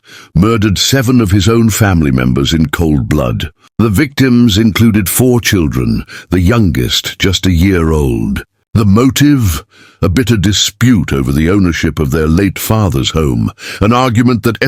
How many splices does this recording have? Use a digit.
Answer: 0